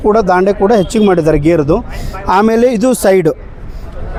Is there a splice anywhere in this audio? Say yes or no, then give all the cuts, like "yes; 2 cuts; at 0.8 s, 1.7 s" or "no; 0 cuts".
no; 0 cuts